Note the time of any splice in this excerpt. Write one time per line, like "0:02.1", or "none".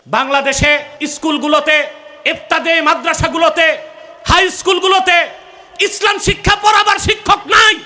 0:01.0